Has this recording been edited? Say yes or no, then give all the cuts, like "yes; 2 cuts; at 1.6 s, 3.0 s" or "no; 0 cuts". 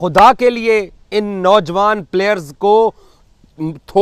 no; 0 cuts